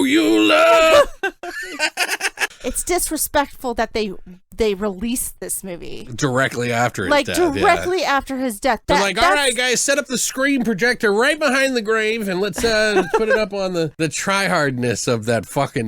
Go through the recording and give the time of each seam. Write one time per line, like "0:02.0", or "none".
0:02.5
0:08.8
0:13.9